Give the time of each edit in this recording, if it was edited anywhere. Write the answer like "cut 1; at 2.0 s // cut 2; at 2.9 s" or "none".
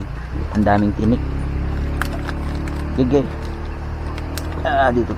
none

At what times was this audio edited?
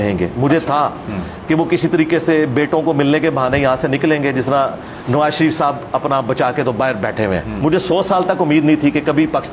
cut 1; at 7.5 s

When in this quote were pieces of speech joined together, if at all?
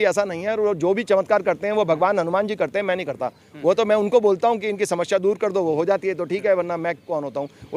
none

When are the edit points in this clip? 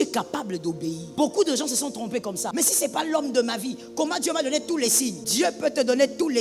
cut 1; at 1.0 s // cut 2; at 2.4 s // cut 3; at 5.2 s

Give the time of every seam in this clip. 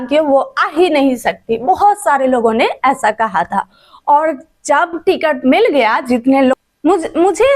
cut 1; at 6.5 s

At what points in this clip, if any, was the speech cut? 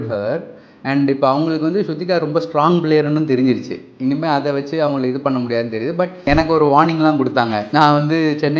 cut 1; at 6.3 s // cut 2; at 7.6 s

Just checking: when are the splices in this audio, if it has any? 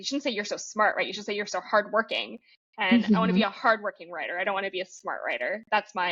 none

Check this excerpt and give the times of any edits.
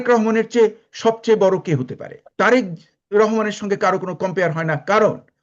cut 1; at 2.2 s

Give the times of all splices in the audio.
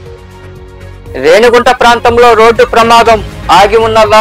cut 1; at 1.0 s

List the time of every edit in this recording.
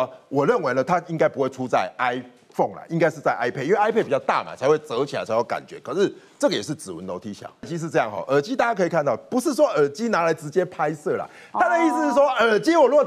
cut 1; at 7.7 s

